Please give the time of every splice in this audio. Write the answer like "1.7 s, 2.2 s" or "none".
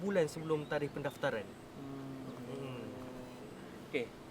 none